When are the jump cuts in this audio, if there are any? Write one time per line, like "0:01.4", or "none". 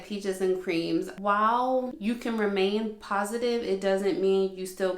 0:01.1
0:01.9